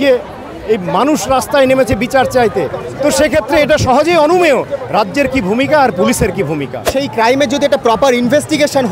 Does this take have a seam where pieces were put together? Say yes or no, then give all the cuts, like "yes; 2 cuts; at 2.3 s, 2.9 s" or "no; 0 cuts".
yes; 1 cut; at 6.8 s